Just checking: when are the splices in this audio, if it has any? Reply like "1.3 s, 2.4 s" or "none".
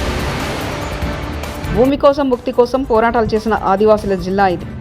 1.6 s